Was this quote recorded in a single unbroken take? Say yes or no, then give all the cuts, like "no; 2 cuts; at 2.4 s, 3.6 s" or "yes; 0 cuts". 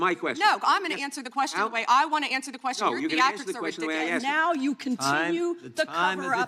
no; 1 cut; at 4.2 s